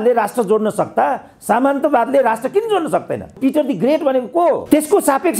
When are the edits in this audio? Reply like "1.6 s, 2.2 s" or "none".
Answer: 3.4 s